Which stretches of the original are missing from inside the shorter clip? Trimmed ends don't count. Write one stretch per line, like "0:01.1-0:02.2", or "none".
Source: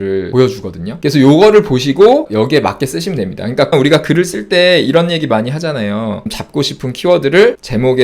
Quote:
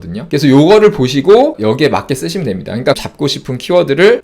0:03.7-0:06.3